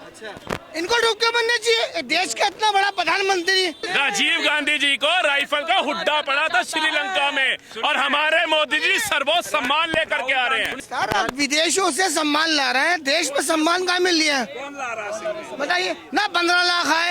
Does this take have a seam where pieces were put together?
yes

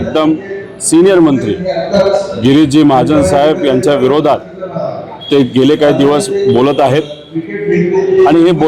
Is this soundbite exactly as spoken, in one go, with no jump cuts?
yes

